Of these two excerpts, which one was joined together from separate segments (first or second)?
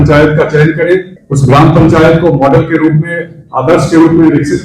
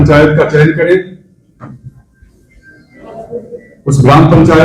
first